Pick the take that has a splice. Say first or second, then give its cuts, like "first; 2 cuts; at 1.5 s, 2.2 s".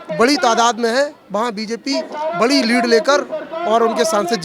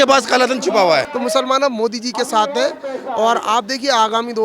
second; 1 cut; at 1.1 s